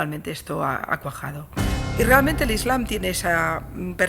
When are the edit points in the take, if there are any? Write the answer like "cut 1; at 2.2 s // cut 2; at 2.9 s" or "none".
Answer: cut 1; at 1.9 s